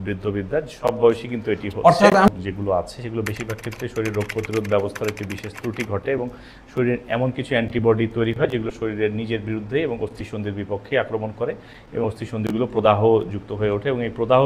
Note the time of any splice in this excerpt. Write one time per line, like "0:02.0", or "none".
0:02.3